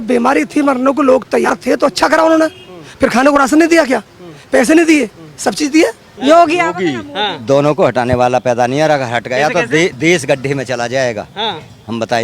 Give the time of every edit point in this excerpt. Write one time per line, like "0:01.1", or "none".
0:01.5
0:06.1